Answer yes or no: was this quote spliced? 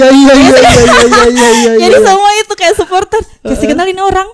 no